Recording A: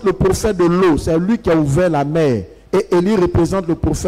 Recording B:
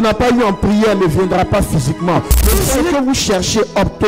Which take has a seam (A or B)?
B